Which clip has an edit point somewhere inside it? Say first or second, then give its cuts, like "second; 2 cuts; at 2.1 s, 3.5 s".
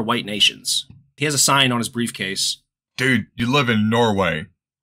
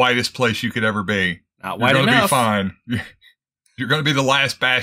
first; 2 cuts; at 1.1 s, 3.3 s